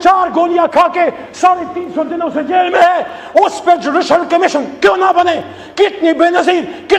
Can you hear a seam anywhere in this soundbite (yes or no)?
no